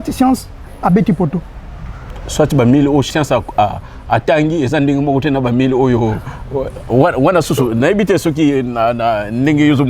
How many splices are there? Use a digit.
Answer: 1